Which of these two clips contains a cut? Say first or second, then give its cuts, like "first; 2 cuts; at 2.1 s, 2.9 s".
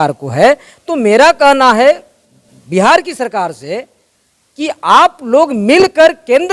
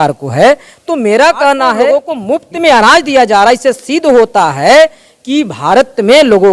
second; 1 cut; at 1.9 s